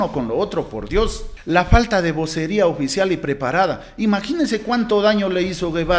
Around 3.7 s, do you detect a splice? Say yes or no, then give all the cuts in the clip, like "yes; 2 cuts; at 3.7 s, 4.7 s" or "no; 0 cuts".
no; 1 cut; at 1.3 s